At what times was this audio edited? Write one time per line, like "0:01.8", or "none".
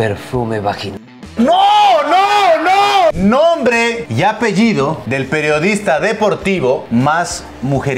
0:03.2
0:04.1
0:05.0
0:06.8